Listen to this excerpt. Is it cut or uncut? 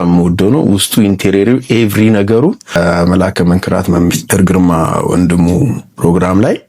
cut